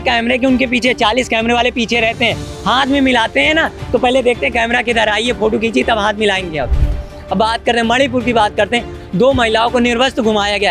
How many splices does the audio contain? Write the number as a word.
zero